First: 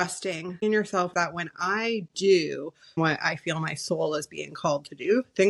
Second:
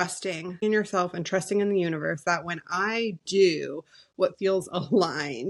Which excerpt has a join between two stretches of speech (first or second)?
first